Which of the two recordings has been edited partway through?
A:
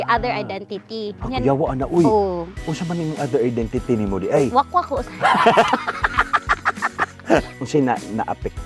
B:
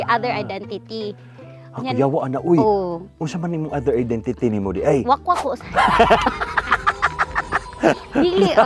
A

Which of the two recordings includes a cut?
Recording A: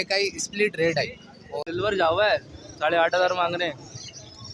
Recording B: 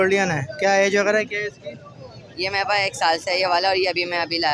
A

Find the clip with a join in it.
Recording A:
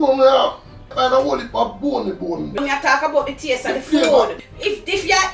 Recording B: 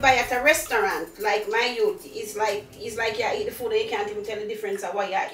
A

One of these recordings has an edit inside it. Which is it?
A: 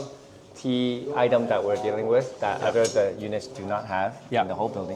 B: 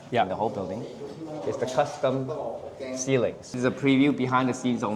B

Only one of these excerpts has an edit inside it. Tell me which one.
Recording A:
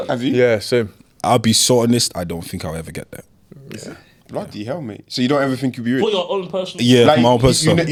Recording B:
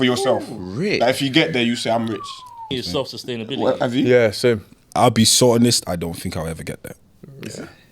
B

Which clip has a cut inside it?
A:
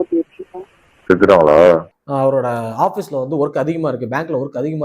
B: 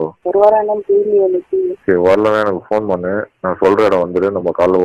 A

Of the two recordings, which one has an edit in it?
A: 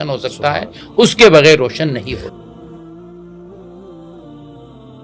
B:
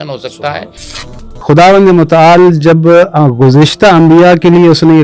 B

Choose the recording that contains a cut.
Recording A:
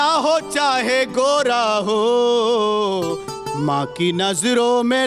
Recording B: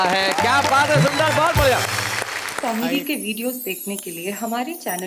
B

